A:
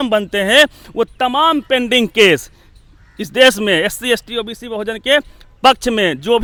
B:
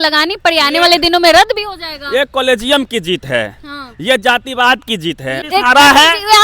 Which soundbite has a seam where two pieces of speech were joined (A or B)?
B